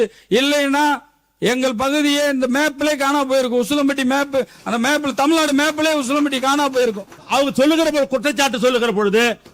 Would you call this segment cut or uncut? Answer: cut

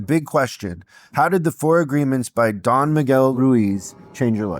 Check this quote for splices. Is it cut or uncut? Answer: cut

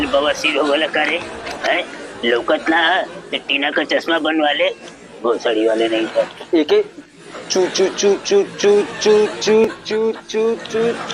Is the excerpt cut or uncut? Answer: cut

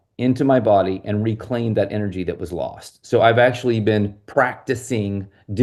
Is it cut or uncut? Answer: uncut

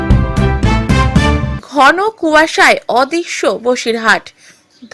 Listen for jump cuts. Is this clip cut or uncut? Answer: cut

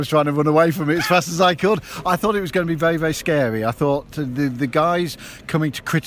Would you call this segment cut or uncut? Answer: uncut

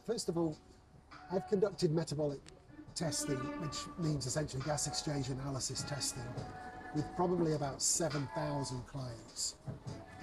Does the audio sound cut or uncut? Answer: uncut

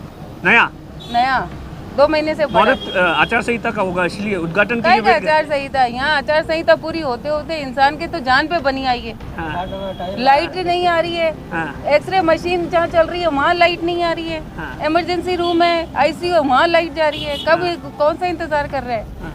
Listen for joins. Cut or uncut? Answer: uncut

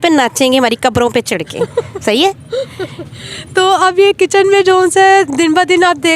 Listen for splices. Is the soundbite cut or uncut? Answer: uncut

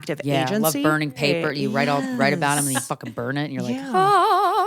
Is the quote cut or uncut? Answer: cut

